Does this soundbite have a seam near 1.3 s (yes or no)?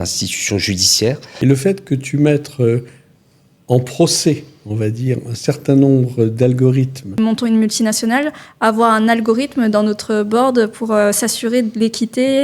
yes